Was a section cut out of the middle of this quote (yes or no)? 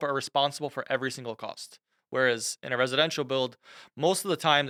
no